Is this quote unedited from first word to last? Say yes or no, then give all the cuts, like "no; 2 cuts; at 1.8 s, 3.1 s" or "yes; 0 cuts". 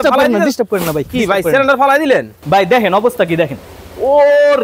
no; 1 cut; at 2.3 s